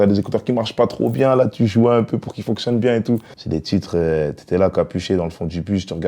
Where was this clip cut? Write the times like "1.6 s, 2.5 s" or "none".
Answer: 3.3 s